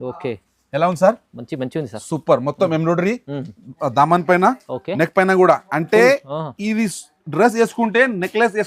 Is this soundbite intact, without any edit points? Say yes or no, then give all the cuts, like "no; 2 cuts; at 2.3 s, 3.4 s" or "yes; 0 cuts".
yes; 0 cuts